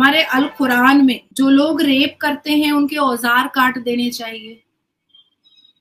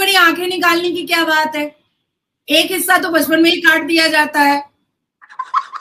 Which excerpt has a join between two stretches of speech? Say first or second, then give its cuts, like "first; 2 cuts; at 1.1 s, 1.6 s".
first; 1 cut; at 1.2 s